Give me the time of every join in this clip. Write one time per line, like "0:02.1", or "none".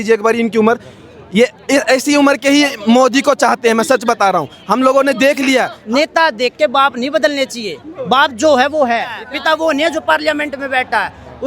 0:05.8
0:09.3